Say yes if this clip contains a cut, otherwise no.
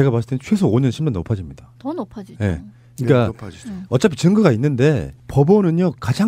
no